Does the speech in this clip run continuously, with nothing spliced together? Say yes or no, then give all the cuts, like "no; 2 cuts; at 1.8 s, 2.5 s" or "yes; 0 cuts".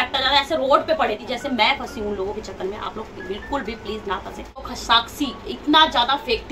no; 2 cuts; at 1.2 s, 4.7 s